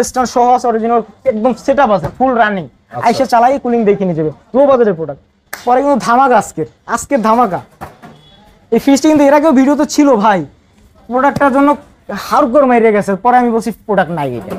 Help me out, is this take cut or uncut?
uncut